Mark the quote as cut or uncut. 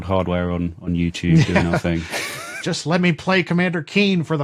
uncut